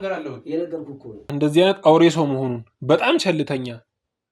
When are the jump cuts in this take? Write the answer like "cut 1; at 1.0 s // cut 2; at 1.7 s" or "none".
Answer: cut 1; at 1.3 s